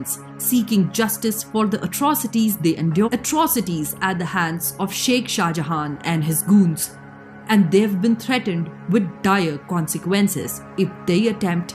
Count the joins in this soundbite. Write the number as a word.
one